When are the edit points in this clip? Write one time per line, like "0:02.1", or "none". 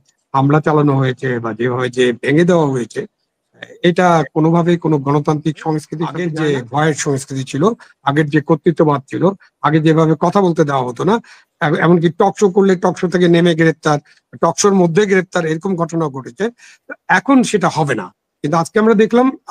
0:06.2